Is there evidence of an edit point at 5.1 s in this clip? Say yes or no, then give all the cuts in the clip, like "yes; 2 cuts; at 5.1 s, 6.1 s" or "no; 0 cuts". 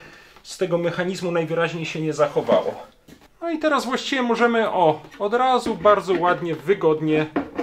no; 1 cut; at 3.2 s